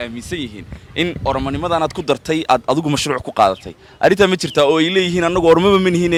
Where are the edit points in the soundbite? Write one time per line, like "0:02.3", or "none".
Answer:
none